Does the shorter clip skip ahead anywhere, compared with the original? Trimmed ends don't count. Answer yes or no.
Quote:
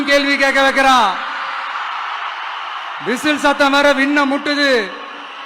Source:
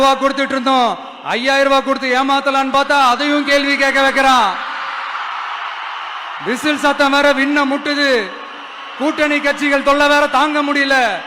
no